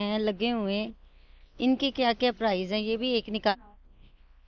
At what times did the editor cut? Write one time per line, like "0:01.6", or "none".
0:03.5